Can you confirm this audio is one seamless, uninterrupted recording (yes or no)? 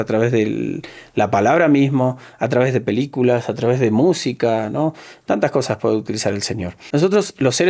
no